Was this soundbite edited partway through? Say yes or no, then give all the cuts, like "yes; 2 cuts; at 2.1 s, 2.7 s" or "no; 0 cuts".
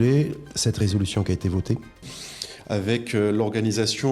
yes; 1 cut; at 2.1 s